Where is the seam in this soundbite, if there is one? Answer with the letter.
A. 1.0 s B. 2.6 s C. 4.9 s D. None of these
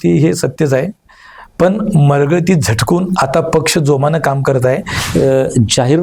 C